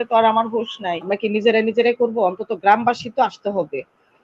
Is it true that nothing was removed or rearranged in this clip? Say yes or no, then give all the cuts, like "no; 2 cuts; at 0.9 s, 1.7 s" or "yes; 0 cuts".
no; 1 cut; at 1.0 s